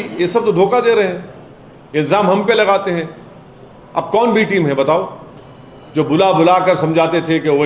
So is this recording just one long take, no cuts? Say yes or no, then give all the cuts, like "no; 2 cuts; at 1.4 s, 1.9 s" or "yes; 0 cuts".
yes; 0 cuts